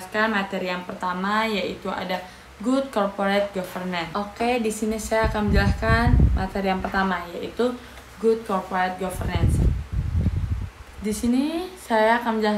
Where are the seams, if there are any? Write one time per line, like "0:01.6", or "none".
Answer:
0:04.0